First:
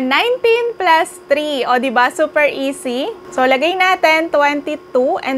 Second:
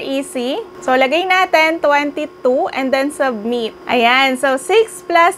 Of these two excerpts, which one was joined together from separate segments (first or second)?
second